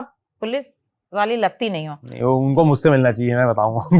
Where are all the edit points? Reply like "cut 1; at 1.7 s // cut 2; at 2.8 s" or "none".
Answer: none

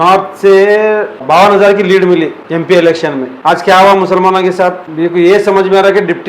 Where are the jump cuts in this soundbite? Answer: cut 1; at 1.2 s // cut 2; at 2.4 s // cut 3; at 3.3 s // cut 4; at 4.8 s

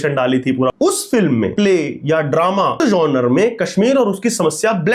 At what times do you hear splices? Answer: cut 1; at 0.7 s // cut 2; at 1.5 s // cut 3; at 2.8 s

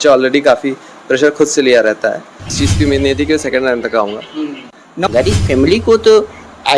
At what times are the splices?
cut 1; at 2.5 s // cut 2; at 4.8 s

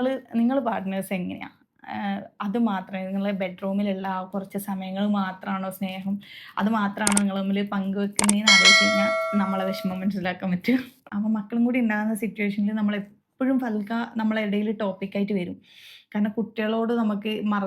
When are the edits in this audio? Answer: cut 1; at 11.0 s

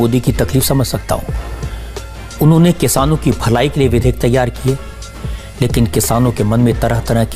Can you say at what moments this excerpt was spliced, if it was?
none

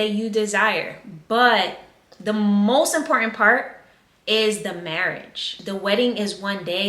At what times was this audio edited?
cut 1; at 5.5 s

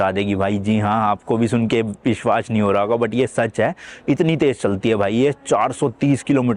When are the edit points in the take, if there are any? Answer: none

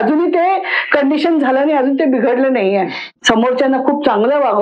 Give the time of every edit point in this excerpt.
cut 1; at 3.0 s

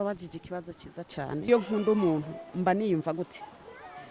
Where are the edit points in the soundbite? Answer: cut 1; at 1.5 s

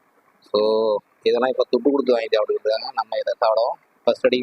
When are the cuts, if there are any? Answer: none

